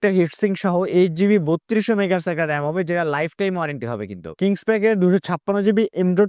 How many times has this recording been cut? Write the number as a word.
one